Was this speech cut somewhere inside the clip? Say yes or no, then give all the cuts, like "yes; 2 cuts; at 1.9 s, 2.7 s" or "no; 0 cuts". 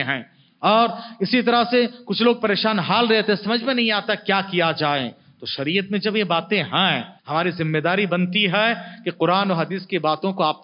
yes; 1 cut; at 7.1 s